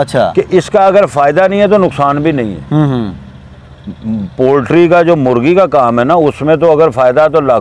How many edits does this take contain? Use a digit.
0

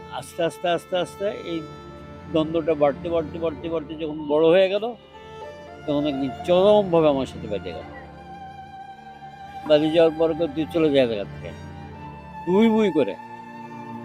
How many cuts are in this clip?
0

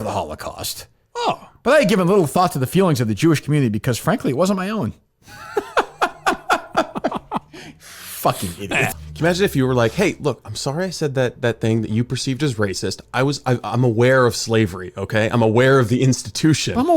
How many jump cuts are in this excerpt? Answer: 1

